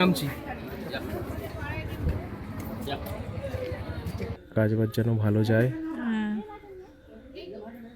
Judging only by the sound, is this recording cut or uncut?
cut